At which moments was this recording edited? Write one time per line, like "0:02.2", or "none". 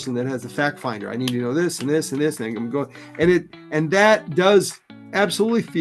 none